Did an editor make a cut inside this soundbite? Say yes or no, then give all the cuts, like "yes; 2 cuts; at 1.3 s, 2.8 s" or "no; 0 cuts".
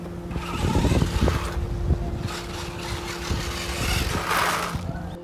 no; 0 cuts